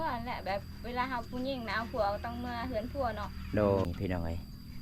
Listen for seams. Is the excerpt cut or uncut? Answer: cut